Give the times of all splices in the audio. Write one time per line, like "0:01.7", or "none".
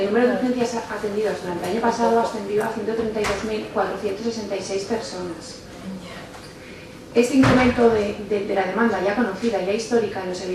0:02.9